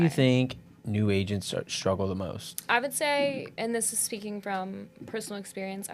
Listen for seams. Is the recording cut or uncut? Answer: cut